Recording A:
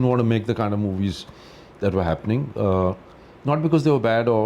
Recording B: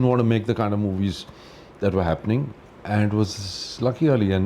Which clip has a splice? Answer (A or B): B